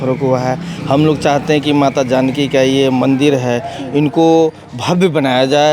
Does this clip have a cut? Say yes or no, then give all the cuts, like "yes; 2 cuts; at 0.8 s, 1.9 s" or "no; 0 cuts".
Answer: no; 0 cuts